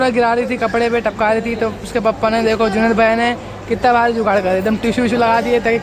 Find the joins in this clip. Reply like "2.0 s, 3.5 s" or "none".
none